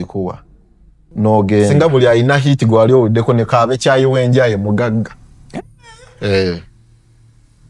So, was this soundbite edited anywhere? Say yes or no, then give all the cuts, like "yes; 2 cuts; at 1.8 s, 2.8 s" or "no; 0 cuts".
yes; 1 cut; at 1.7 s